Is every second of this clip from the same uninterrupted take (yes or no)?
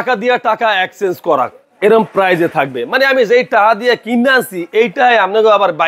yes